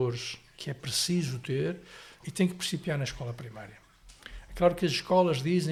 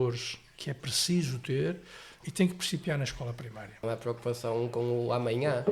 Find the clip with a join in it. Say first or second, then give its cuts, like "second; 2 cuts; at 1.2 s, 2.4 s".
second; 1 cut; at 3.8 s